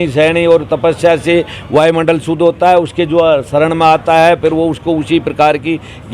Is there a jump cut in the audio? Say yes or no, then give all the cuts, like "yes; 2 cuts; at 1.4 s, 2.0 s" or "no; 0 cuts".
no; 0 cuts